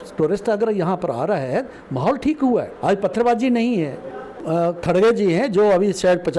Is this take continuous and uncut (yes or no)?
no